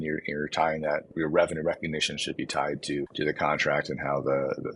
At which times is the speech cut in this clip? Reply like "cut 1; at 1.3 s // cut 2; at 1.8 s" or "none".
cut 1; at 1.1 s // cut 2; at 3.1 s